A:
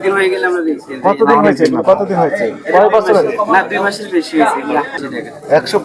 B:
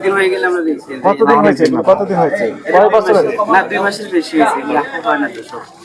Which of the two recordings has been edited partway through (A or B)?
A